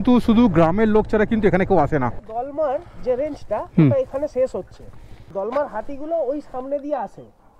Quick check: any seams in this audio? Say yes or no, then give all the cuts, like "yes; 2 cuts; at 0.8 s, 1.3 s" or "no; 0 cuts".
yes; 2 cuts; at 2.2 s, 5.1 s